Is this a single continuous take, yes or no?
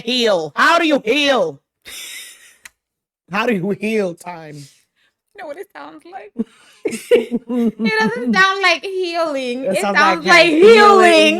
yes